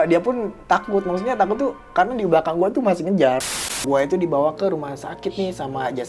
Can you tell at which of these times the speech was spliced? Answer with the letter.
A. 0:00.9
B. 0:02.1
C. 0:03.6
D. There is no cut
C